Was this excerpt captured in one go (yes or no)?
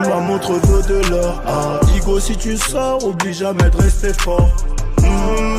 yes